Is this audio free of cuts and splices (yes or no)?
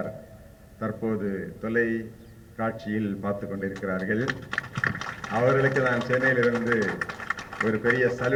yes